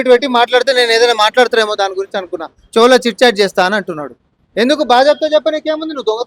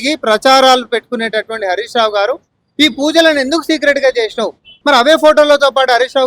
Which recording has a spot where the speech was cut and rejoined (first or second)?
second